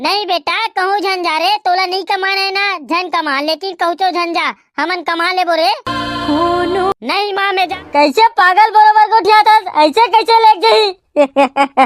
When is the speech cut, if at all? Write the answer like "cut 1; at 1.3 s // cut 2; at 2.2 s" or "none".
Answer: cut 1; at 7.8 s